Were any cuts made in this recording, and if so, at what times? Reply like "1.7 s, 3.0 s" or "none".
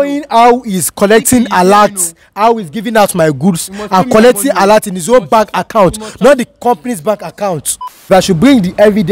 7.8 s